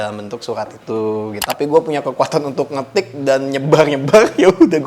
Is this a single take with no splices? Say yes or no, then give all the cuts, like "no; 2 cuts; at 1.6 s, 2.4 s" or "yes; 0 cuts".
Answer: no; 1 cut; at 1.4 s